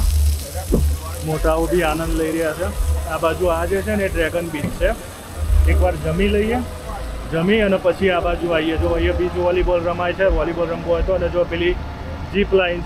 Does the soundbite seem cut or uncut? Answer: uncut